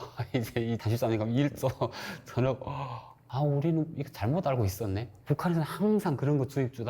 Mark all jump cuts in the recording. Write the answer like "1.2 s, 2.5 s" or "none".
0.8 s, 3.2 s, 4.2 s